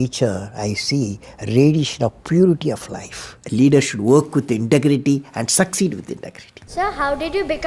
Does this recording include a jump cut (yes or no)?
yes